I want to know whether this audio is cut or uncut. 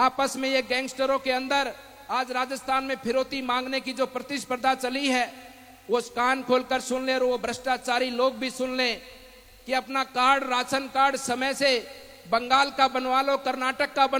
uncut